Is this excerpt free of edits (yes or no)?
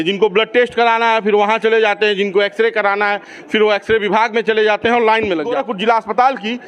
no